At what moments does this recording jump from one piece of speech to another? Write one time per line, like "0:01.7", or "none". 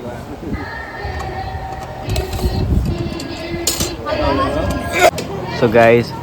0:05.2